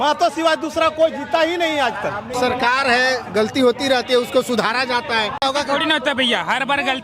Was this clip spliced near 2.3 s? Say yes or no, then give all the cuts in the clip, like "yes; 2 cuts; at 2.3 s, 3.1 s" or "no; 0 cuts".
yes; 2 cuts; at 2.3 s, 5.4 s